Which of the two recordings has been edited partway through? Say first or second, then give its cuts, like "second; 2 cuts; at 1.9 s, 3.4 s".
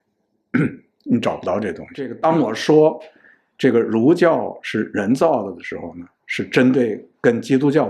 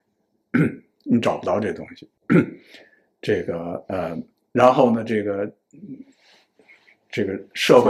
first; 1 cut; at 2.1 s